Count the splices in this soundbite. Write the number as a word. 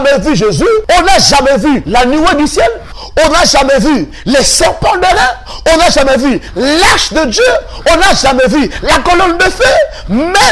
two